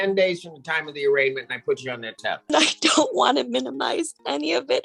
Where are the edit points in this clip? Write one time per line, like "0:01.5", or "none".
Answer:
0:02.5